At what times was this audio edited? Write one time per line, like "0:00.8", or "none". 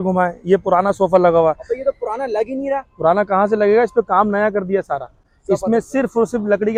none